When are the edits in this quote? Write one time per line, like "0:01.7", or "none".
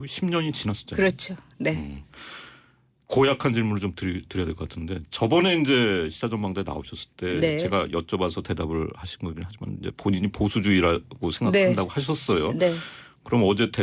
0:07.9

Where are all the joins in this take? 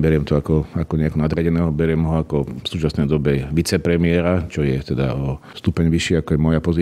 0:02.6
0:05.5

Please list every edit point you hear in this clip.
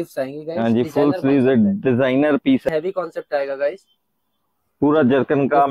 0:02.7

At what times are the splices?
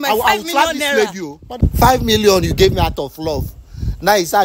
0:01.5

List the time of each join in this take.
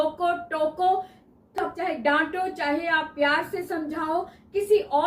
0:01.7

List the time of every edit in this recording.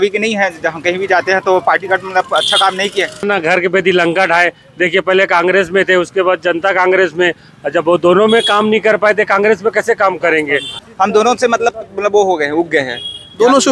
0:03.2
0:10.7

